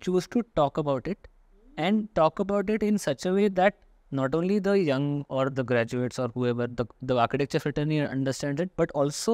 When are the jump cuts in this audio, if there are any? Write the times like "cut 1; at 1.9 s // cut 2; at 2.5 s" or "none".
none

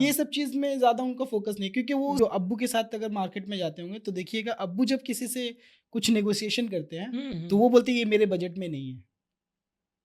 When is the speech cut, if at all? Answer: cut 1; at 2.2 s

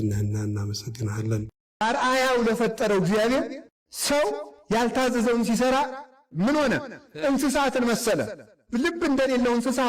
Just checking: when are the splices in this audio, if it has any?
cut 1; at 1.7 s

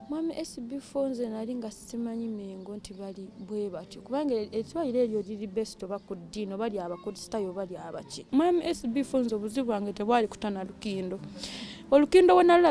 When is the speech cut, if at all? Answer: cut 1; at 8.2 s

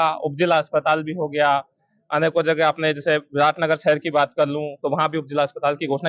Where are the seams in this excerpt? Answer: none

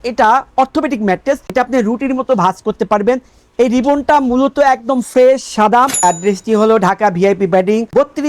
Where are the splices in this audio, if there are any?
cut 1; at 5.9 s

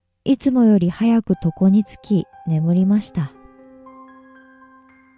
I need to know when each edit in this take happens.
none

